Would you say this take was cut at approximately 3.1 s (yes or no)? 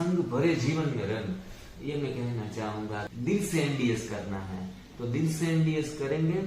yes